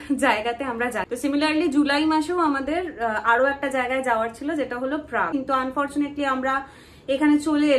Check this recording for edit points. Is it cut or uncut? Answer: cut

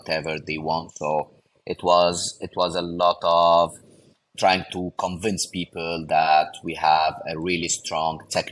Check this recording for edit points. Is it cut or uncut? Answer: uncut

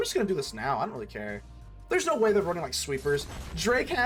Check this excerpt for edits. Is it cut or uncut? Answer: uncut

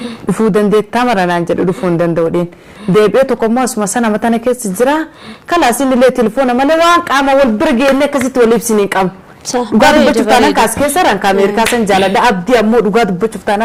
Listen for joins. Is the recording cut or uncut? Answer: uncut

